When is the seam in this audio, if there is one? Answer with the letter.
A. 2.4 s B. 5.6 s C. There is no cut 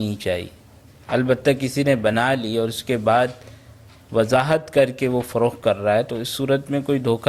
C